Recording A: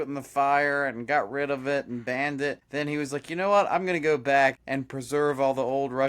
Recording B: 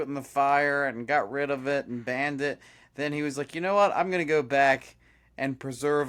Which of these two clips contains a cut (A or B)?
A